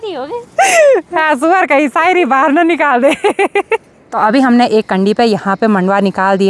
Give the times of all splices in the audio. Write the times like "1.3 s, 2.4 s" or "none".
none